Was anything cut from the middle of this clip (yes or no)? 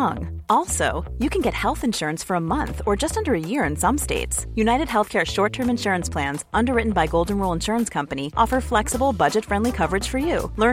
no